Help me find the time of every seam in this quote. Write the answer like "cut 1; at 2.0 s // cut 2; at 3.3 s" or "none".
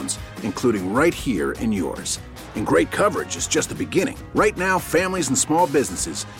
none